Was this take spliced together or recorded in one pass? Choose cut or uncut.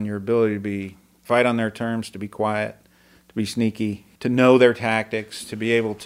cut